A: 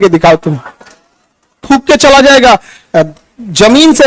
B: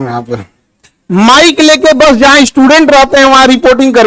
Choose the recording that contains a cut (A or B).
A